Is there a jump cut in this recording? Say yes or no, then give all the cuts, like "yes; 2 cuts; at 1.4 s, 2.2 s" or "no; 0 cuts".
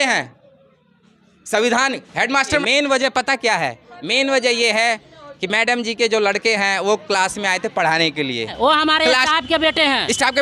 yes; 2 cuts; at 2.6 s, 8.5 s